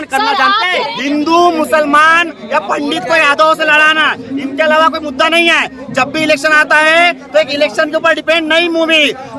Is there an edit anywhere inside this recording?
yes; 1 cut; at 0.9 s

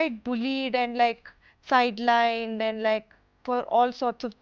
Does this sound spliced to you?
no; 0 cuts

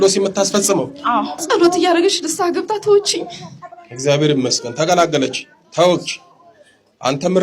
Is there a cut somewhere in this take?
yes; 1 cut; at 1.3 s

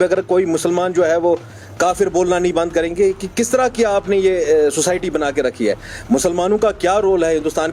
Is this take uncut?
yes; 0 cuts

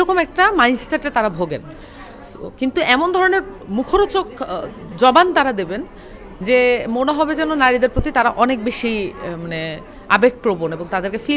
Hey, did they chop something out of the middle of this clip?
no; 0 cuts

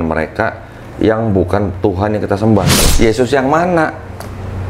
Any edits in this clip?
yes; 1 cut; at 2.8 s

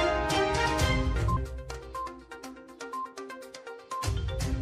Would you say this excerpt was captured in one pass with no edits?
no; 1 cut; at 1.1 s

